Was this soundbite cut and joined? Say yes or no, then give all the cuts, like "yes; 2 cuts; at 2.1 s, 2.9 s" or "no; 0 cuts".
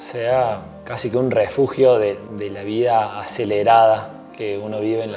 no; 0 cuts